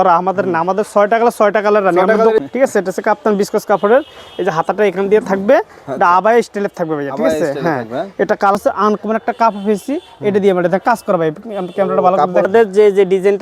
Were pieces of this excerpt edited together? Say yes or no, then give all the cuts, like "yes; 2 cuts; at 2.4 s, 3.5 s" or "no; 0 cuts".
yes; 3 cuts; at 2.4 s, 8.6 s, 12.5 s